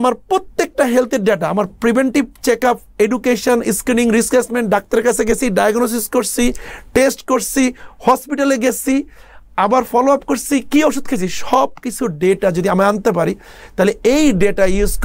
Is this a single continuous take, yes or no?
yes